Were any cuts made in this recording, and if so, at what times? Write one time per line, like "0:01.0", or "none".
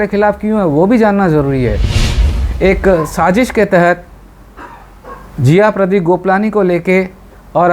0:02.2